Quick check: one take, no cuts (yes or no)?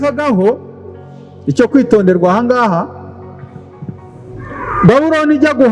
yes